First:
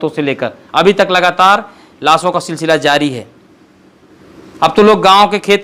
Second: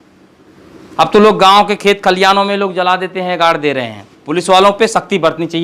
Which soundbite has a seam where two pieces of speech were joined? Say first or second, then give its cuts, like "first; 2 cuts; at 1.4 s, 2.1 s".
second; 1 cut; at 4.2 s